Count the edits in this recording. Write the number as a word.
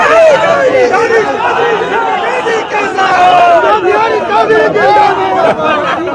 one